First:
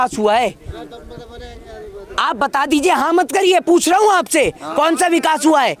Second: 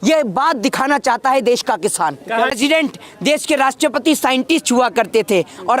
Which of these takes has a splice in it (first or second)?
second